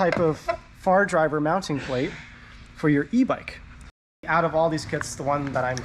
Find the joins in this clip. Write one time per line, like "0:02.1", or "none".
0:04.2